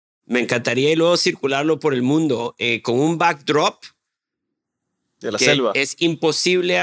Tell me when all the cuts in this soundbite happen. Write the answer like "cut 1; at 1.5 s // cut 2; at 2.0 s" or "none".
none